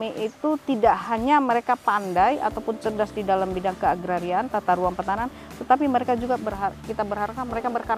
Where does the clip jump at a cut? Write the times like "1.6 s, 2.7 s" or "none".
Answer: none